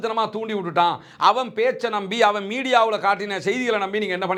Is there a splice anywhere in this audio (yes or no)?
no